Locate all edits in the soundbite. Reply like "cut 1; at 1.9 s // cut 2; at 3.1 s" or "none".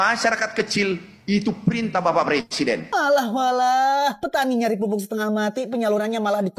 cut 1; at 2.9 s